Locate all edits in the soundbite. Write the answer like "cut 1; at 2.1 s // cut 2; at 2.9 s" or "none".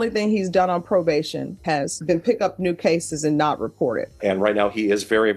cut 1; at 1.6 s // cut 2; at 4.1 s